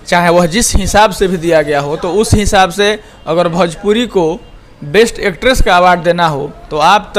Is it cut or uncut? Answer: uncut